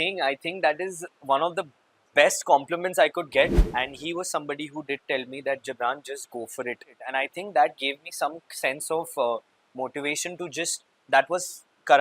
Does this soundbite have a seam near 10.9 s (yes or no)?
yes